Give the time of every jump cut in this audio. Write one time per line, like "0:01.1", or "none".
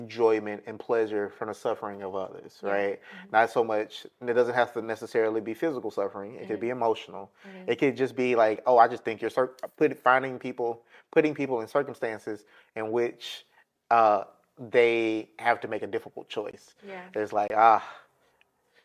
none